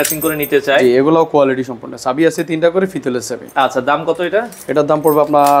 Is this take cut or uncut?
uncut